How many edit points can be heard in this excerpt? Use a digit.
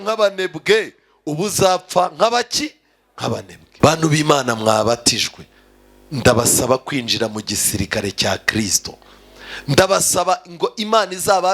1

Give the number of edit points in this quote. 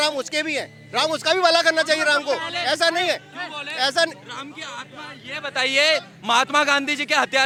0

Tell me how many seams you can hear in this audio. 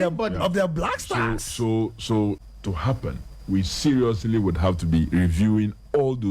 1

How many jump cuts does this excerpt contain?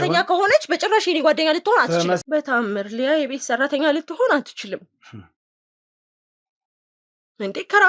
1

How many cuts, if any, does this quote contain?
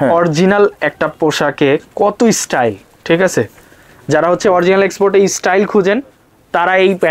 0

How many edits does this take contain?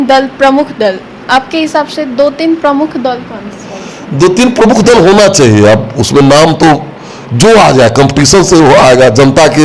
0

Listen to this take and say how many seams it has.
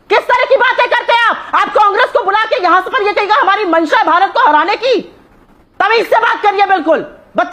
0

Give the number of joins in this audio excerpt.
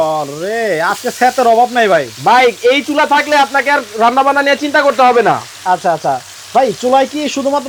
0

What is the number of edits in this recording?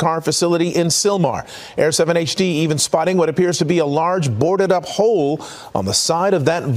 1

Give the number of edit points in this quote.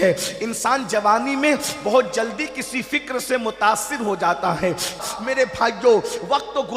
1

